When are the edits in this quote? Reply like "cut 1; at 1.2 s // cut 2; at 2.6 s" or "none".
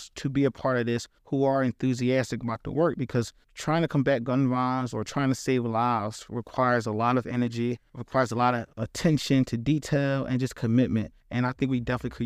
none